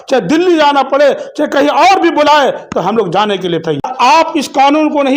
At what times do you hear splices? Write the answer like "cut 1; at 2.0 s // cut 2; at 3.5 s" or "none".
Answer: cut 1; at 3.8 s